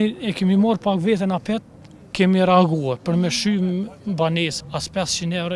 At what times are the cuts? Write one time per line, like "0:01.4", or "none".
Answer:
0:04.5